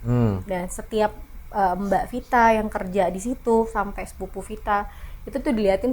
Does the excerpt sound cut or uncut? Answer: uncut